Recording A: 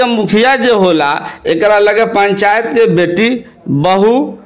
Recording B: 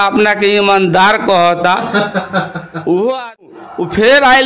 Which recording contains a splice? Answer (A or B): B